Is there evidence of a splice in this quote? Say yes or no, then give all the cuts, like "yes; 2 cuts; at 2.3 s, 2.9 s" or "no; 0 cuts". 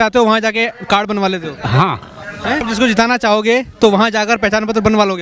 yes; 1 cut; at 2.6 s